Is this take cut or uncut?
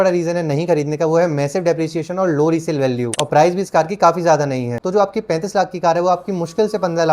cut